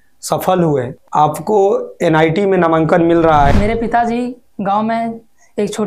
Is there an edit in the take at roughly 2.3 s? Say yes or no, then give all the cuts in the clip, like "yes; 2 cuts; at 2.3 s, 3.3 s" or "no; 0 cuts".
no; 2 cuts; at 1.0 s, 3.5 s